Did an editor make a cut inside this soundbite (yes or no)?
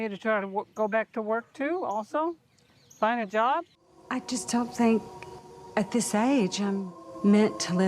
yes